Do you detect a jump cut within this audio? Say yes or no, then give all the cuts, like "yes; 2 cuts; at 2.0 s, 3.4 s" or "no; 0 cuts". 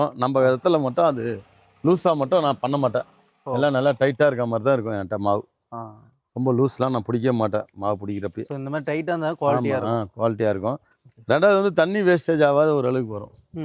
no; 0 cuts